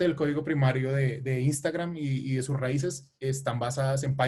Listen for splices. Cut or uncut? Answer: uncut